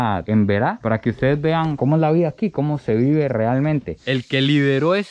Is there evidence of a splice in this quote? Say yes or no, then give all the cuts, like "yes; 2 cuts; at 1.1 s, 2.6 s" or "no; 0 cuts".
yes; 1 cut; at 4.0 s